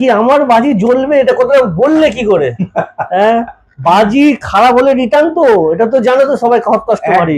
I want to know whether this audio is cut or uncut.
uncut